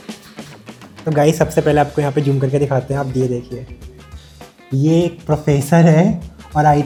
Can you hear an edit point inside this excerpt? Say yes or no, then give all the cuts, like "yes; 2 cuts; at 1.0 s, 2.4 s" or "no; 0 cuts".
no; 0 cuts